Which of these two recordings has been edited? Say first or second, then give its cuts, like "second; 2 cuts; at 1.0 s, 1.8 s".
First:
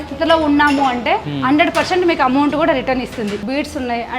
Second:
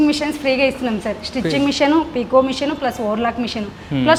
first; 2 cuts; at 1.3 s, 3.3 s